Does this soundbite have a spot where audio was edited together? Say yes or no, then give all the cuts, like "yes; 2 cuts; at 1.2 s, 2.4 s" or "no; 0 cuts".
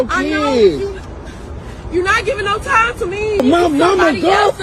yes; 1 cut; at 3.4 s